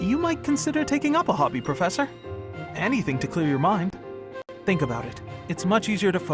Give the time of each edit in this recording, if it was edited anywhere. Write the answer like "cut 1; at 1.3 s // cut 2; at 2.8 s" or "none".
none